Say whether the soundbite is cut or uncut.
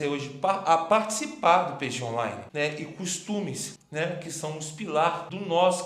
cut